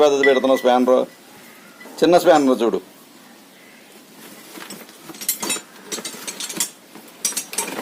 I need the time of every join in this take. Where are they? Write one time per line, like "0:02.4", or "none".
none